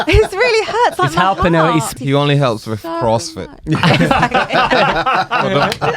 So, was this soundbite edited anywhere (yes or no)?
yes